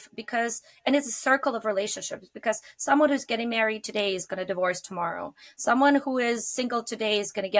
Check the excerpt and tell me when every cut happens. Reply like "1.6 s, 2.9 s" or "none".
none